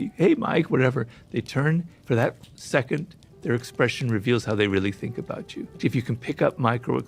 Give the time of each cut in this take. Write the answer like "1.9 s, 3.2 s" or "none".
1.9 s, 5.8 s